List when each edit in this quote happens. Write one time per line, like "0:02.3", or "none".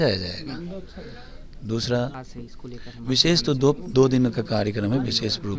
0:02.2